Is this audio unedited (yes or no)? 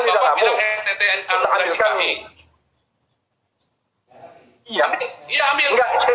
yes